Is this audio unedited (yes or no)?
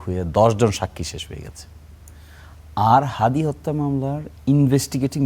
yes